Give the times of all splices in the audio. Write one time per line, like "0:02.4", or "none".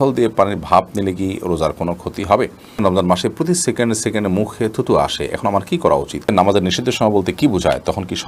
0:02.7
0:06.2